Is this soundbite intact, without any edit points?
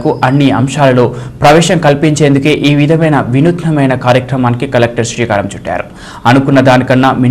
yes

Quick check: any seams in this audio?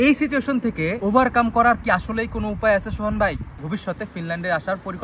yes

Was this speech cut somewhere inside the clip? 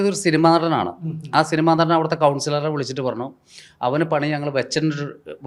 no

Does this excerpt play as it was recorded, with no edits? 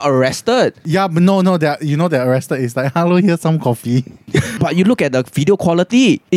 no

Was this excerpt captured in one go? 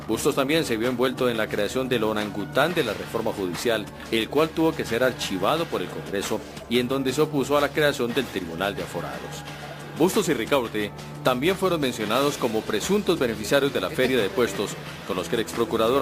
no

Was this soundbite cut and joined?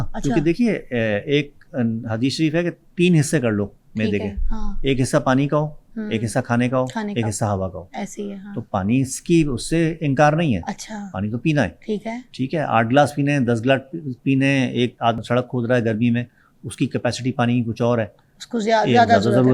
yes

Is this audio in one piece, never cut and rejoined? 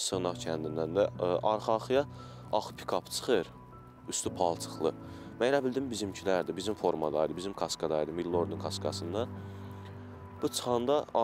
yes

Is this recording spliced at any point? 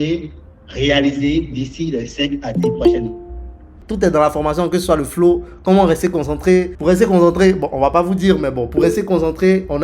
yes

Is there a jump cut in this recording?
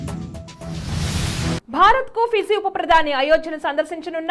no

